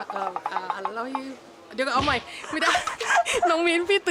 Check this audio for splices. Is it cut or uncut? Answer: uncut